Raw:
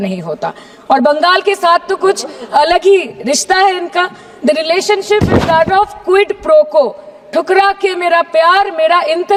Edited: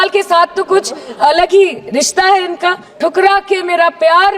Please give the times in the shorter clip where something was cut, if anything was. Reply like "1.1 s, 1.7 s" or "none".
2.9 s